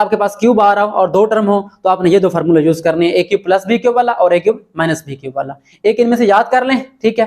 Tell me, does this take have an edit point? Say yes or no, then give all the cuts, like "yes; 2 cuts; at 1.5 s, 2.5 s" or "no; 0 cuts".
no; 0 cuts